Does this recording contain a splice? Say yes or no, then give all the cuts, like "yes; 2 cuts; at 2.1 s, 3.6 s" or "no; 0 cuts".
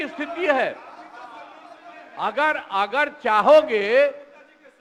no; 0 cuts